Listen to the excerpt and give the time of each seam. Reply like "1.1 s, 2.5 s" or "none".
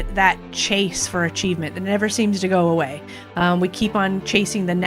none